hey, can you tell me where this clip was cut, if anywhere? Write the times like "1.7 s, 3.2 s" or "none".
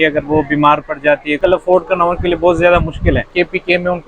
1.4 s, 3.3 s